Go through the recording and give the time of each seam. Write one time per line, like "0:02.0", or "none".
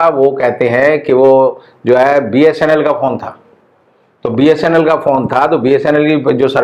none